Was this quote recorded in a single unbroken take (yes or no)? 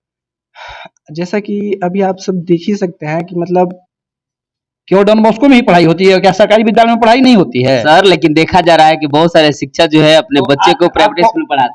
no